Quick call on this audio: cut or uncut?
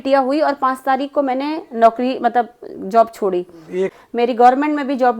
cut